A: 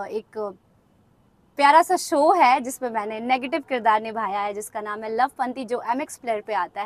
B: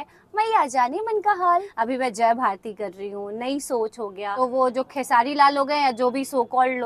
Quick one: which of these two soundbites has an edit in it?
B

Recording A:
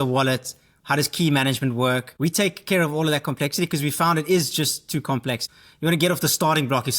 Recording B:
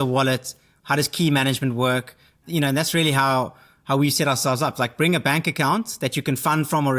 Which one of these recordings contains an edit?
A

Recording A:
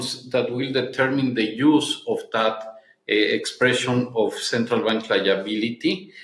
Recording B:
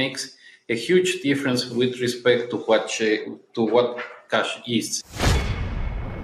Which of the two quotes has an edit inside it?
B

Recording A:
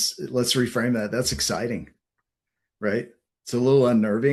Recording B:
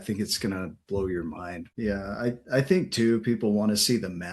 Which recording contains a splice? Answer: B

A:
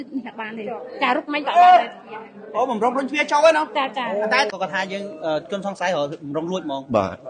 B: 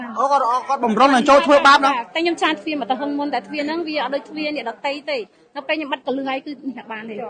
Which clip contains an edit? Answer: A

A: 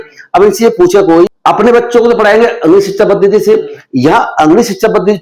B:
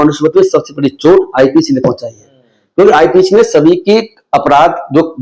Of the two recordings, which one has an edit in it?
A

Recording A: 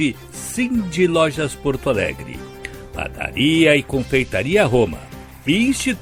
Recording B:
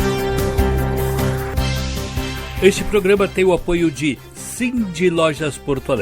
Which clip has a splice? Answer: B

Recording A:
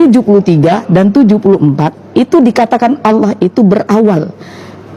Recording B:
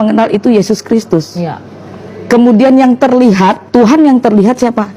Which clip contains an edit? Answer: B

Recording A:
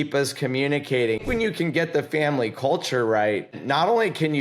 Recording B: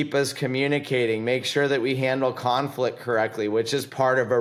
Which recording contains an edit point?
A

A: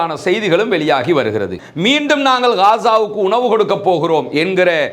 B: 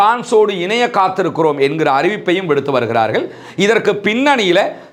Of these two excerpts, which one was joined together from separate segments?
A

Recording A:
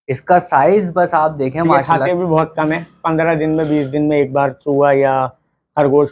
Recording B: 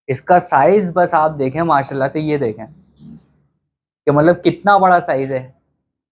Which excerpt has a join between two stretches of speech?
A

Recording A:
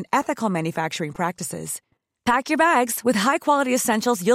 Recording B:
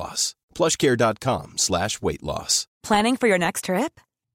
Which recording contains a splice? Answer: B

